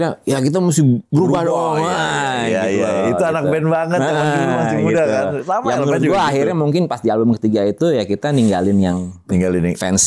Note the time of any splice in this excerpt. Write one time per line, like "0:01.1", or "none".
none